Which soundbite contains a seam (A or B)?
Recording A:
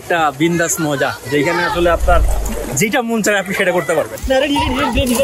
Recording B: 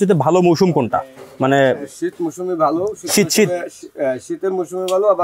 A